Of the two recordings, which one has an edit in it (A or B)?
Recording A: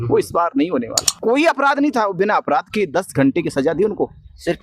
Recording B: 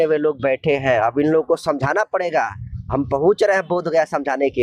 A